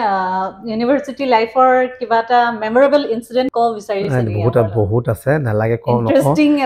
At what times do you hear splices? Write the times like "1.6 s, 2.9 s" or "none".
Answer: 3.8 s